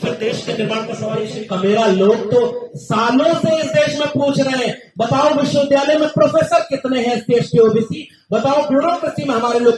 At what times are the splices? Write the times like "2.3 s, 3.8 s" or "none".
1.3 s